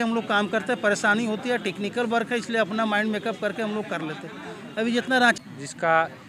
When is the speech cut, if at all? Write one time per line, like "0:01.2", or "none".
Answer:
0:05.4